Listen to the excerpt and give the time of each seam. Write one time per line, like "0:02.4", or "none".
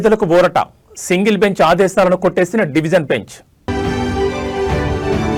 none